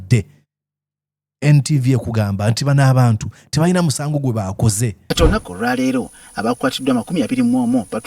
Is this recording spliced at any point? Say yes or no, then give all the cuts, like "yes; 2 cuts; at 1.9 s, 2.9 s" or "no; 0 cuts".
yes; 1 cut; at 5.0 s